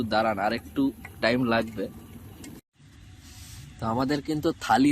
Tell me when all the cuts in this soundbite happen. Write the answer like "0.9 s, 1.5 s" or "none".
2.7 s